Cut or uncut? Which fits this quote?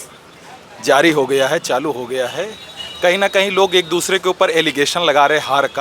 uncut